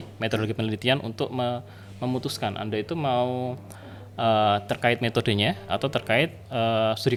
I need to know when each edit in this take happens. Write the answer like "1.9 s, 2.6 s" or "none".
none